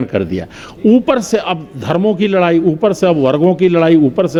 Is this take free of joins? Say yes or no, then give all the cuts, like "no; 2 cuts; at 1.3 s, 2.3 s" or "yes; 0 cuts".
yes; 0 cuts